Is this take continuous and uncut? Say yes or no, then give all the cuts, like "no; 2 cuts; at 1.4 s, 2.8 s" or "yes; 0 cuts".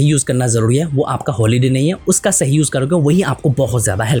yes; 0 cuts